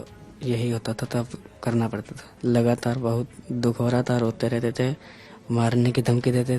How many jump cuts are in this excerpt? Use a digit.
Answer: 1